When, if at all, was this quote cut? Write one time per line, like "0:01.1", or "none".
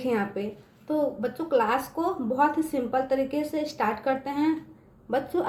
none